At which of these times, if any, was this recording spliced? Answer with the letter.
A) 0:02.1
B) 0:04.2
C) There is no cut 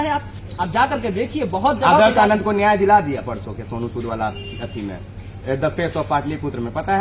C